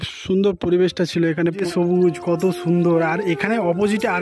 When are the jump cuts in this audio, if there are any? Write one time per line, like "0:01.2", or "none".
0:01.6